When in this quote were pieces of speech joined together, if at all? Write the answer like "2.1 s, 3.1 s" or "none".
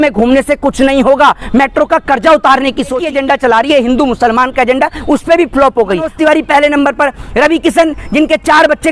3.0 s, 6.1 s